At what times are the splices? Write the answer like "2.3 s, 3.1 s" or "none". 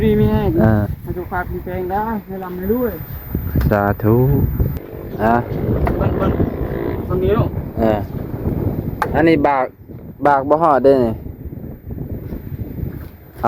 4.8 s